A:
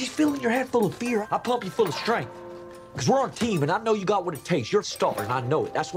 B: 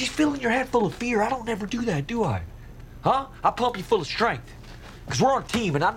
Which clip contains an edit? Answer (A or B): A